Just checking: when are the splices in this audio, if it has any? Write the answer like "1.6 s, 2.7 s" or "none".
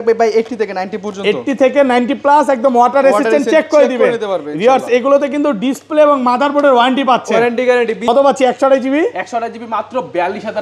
8.0 s